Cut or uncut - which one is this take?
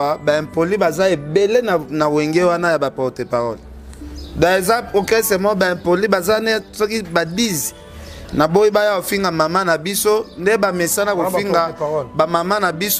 uncut